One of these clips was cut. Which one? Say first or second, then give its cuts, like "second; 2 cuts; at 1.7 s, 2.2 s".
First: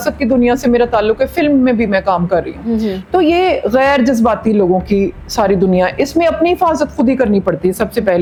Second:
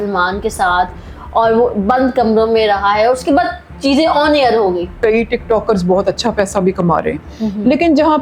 second; 1 cut; at 4.9 s